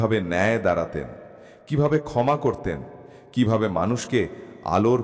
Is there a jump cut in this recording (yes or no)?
no